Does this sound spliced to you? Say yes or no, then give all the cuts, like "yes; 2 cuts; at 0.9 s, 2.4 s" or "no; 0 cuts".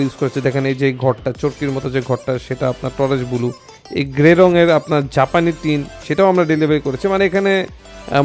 no; 0 cuts